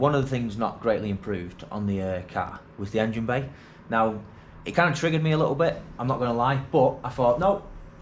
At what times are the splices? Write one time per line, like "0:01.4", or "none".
none